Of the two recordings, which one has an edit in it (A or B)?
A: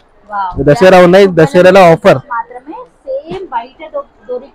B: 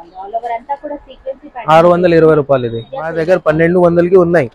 B